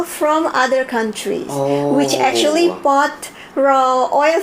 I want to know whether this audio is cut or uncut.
uncut